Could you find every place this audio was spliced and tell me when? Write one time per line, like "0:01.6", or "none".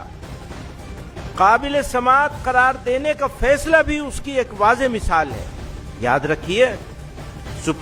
none